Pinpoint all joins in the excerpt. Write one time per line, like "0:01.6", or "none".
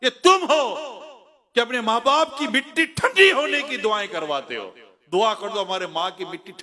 none